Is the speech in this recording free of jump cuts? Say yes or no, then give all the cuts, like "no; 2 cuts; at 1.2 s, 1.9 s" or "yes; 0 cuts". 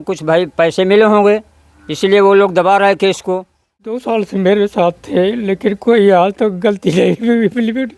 no; 1 cut; at 3.9 s